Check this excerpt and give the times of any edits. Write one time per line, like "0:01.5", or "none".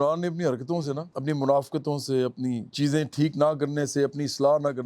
0:01.1
0:02.7